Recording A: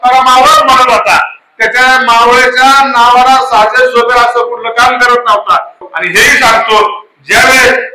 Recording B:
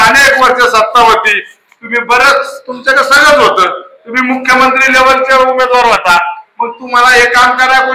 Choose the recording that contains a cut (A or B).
A